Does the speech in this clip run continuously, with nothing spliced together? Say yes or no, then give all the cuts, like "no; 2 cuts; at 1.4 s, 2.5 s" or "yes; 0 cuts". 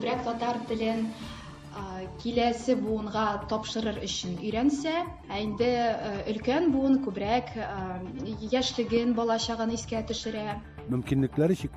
yes; 0 cuts